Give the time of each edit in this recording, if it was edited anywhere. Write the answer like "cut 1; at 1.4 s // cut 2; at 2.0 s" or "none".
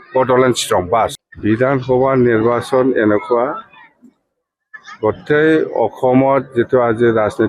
cut 1; at 1.0 s